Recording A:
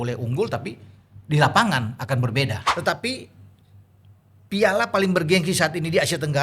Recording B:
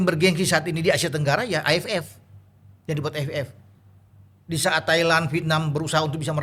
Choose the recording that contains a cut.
A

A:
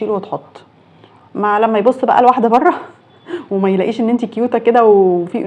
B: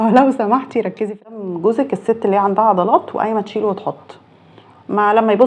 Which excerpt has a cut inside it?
B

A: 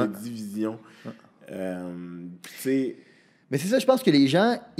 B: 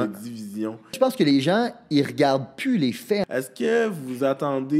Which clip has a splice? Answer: B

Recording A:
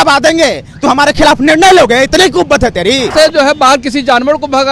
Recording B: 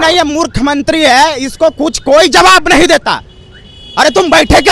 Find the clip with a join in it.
A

